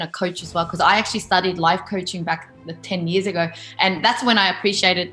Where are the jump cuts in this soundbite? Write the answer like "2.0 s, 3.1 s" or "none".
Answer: none